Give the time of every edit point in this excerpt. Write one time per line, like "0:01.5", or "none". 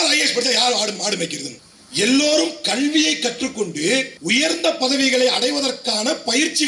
0:01.5
0:04.1